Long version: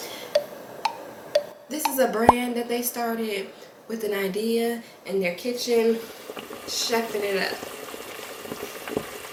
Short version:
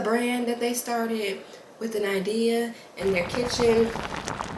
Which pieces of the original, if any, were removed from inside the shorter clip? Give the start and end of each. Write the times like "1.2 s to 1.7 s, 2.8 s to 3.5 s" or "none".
none